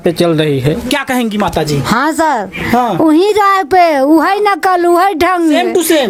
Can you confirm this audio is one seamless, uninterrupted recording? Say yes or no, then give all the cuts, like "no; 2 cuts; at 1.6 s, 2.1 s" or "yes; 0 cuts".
yes; 0 cuts